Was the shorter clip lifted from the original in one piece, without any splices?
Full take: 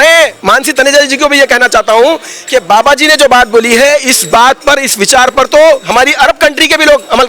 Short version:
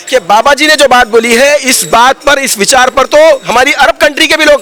yes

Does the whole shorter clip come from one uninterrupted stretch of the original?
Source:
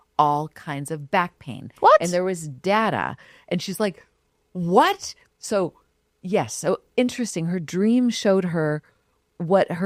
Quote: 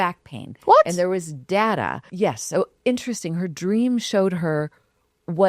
no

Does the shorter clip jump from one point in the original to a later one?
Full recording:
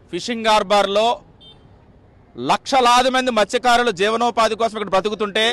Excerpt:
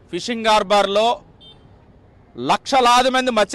no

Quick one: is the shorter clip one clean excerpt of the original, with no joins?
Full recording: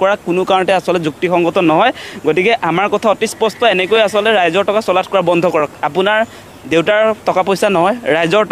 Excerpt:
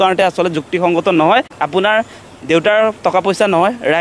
no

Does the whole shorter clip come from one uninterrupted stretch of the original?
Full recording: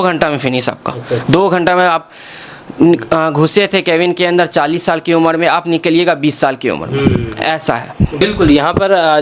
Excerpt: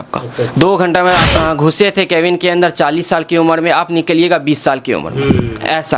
no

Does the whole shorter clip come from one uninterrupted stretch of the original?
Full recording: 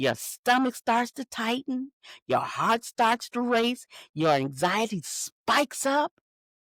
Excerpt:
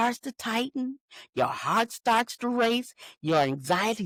yes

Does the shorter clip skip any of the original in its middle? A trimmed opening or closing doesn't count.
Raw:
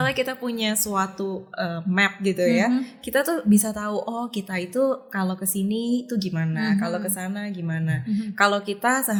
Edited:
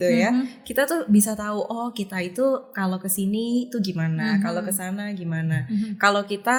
no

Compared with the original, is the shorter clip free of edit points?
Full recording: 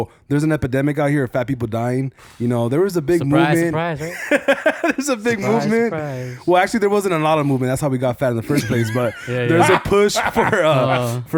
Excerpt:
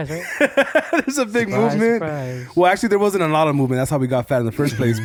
yes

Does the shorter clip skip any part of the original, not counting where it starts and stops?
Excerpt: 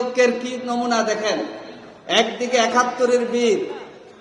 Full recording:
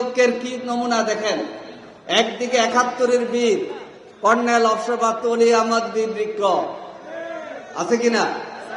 no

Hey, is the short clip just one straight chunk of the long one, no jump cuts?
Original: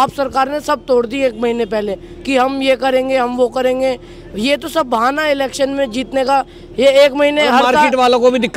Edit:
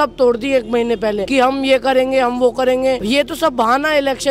no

